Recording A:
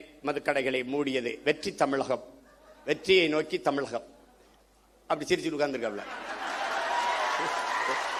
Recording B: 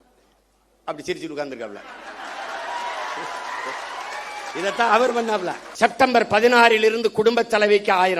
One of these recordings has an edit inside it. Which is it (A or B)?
B